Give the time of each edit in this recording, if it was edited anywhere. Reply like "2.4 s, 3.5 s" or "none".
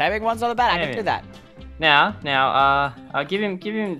none

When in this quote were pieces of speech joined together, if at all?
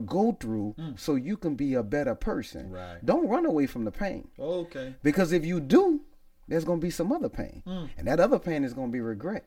none

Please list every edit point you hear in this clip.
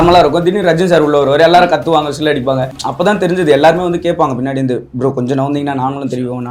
2.8 s

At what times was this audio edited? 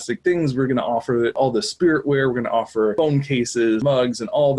1.4 s, 2.9 s, 3.8 s

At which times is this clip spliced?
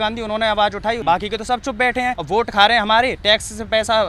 1.0 s, 2.2 s

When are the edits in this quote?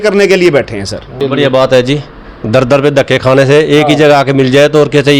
1.1 s

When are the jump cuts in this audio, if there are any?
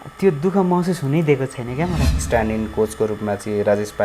2.1 s

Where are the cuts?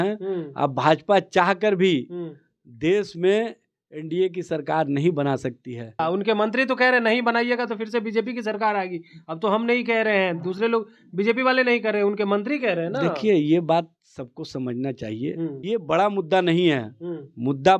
6.0 s, 15.6 s

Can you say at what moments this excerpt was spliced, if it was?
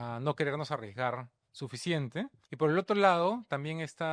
2.4 s

